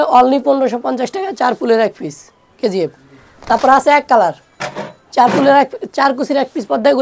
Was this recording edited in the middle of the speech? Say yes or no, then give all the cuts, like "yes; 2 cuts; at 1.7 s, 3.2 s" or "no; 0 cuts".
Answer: no; 0 cuts